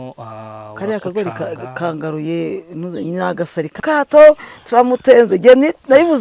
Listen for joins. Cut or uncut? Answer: cut